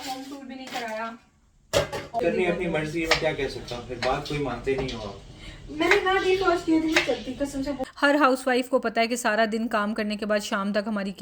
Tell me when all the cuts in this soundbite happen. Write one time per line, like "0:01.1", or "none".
0:02.2
0:07.8